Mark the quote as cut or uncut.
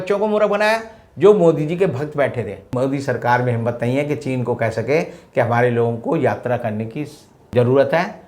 cut